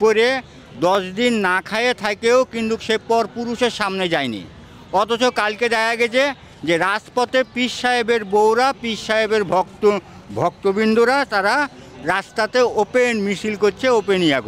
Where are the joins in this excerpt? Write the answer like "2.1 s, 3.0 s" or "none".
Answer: none

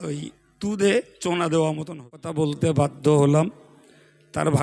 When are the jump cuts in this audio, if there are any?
2.2 s

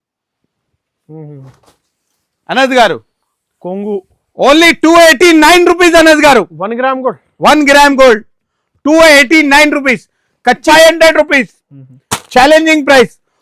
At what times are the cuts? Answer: 10.6 s

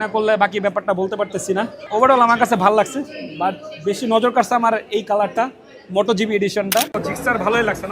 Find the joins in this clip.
1.8 s, 7.0 s

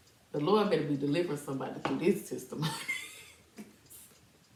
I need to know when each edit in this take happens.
none

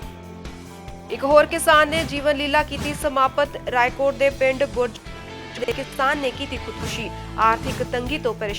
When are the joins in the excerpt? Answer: 1.0 s

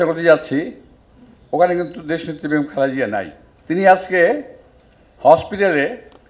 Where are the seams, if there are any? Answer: none

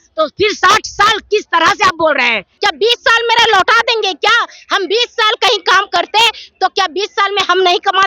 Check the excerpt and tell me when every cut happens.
2.5 s

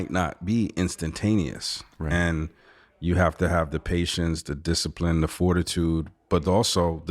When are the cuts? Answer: none

